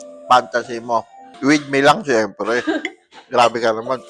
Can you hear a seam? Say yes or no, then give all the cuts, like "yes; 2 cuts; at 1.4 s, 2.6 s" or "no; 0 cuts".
yes; 1 cut; at 1.2 s